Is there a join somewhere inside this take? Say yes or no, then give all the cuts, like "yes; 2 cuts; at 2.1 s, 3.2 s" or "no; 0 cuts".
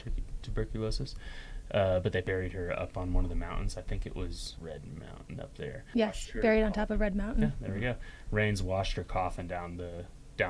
yes; 3 cuts; at 2.3 s, 4.5 s, 5.8 s